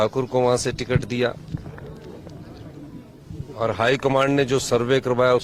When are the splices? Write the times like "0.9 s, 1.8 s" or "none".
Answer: none